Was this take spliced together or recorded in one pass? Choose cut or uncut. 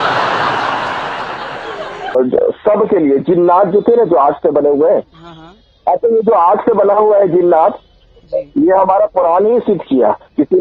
cut